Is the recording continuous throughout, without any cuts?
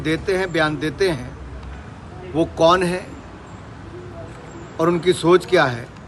yes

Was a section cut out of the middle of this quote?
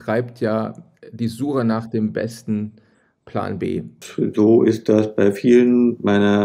yes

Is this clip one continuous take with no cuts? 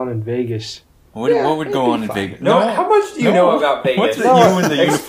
yes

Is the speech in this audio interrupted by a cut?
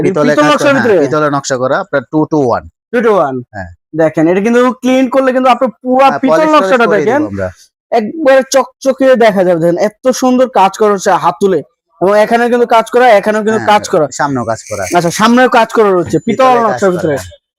no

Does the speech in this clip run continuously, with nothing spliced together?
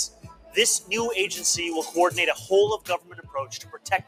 yes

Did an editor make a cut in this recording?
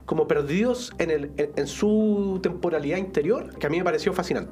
yes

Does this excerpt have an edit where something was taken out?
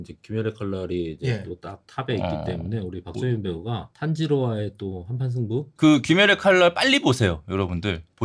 yes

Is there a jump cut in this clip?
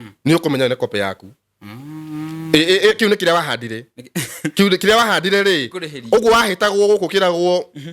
no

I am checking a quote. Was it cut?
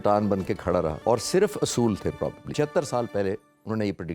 yes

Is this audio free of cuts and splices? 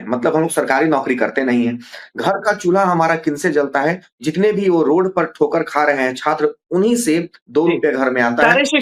yes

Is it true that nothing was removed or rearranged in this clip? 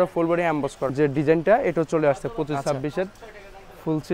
no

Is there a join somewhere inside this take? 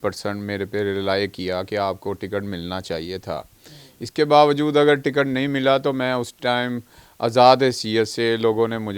no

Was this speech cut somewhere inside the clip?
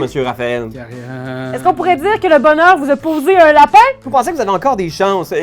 yes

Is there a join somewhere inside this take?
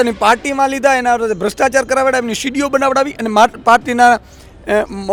no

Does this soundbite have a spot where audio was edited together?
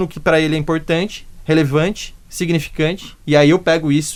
no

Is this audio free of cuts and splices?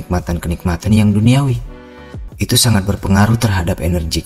no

